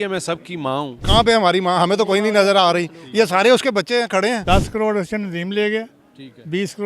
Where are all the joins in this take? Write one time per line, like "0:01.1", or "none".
0:01.0
0:04.4